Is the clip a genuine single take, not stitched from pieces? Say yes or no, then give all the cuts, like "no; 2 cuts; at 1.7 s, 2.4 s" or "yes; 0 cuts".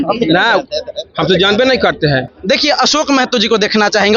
no; 1 cut; at 2.3 s